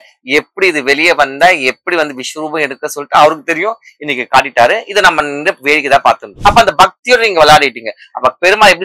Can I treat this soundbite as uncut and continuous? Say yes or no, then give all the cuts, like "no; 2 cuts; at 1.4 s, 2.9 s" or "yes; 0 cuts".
no; 1 cut; at 6.3 s